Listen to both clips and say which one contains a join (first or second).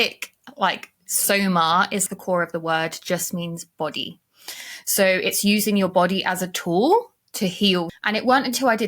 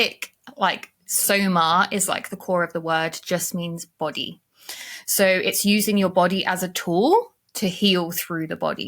first